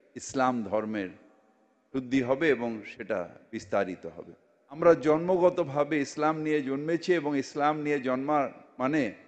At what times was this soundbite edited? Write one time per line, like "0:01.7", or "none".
0:04.8